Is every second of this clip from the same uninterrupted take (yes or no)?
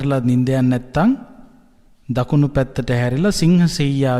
yes